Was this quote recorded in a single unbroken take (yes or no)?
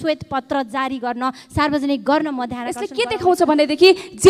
no